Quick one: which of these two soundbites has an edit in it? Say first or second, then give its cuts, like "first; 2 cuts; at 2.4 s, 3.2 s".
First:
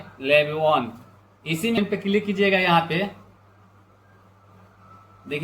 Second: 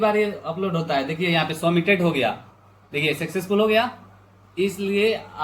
first; 1 cut; at 1.8 s